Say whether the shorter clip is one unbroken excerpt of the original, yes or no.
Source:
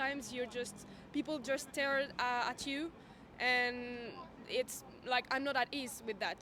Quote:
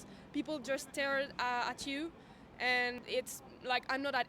no